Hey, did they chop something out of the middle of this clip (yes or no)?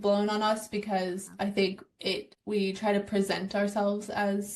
yes